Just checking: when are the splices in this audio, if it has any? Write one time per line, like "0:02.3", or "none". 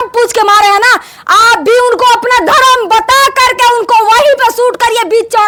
none